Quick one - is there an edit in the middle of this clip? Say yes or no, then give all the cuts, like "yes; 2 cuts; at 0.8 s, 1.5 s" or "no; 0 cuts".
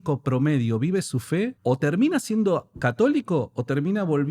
yes; 1 cut; at 1.6 s